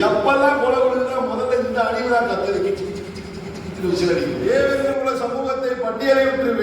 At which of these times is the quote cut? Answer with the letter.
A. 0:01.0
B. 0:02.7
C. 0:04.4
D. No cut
C